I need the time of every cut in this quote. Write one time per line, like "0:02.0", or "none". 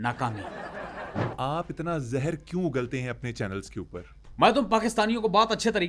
0:01.3
0:04.2